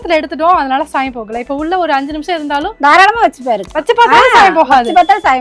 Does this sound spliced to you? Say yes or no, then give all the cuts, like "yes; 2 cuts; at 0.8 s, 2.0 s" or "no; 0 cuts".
no; 0 cuts